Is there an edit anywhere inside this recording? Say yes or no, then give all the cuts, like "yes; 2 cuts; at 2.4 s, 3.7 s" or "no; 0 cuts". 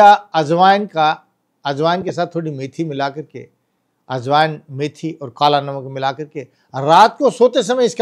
no; 0 cuts